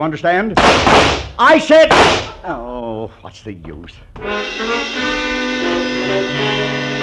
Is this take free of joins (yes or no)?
no